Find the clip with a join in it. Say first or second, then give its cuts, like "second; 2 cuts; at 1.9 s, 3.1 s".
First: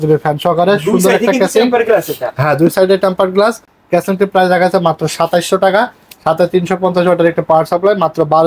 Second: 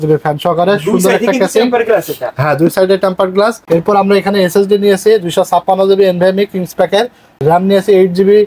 second; 2 cuts; at 3.6 s, 7.4 s